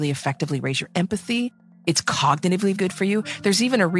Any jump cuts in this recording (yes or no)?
yes